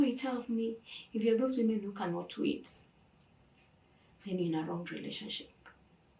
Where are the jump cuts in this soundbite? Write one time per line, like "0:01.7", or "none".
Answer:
none